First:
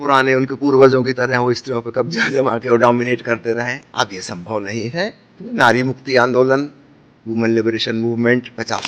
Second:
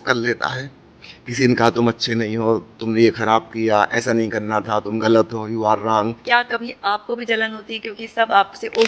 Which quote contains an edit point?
second; 1 cut; at 6.2 s

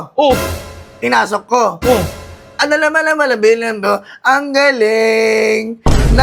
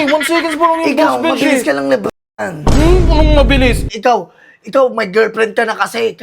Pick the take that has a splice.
second; 1 cut; at 3.9 s

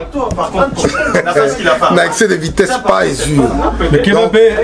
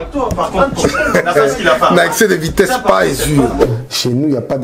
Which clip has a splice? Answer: second; 1 cut; at 3.6 s

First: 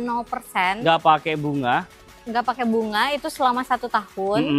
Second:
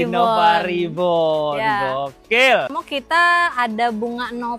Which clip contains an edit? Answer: second; 1 cut; at 2.8 s

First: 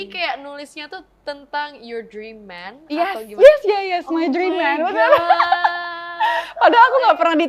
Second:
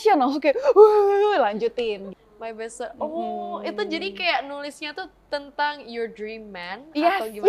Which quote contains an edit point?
second; 1 cut; at 2.1 s

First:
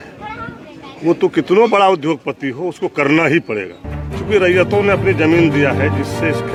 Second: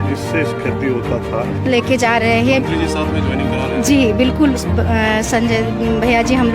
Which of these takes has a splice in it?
second; 1 cut; at 1.6 s

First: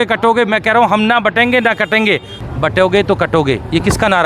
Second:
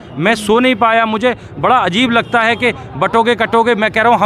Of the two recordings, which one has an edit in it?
first; 1 cut; at 2.3 s

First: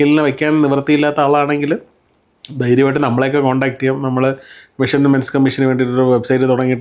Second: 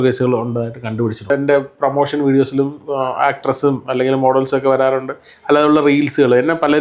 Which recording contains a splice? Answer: second; 1 cut; at 1.3 s

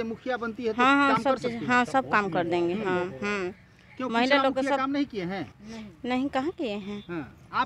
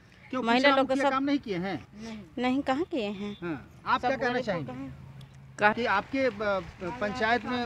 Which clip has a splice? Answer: second; 1 cut; at 5.7 s

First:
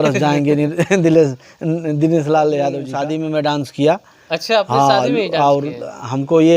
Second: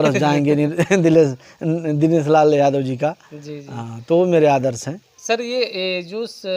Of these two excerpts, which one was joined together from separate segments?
first; 1 cut; at 2.9 s

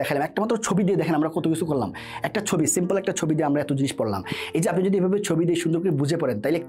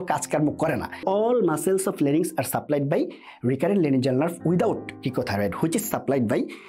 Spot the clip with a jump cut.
second; 1 cut; at 1.0 s

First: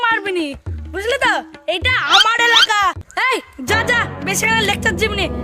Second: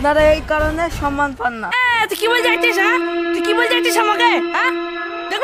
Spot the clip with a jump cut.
first; 1 cut; at 3.1 s

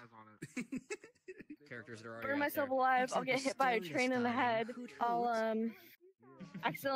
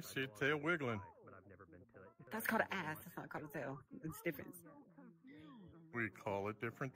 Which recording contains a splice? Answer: first; 1 cut; at 1.6 s

